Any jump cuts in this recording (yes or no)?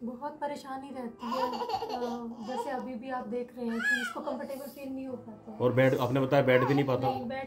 no